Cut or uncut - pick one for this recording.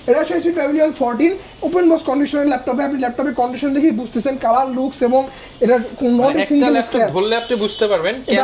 uncut